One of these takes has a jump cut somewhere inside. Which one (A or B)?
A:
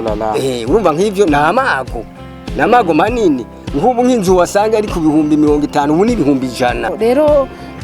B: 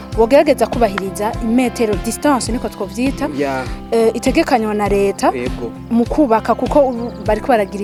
A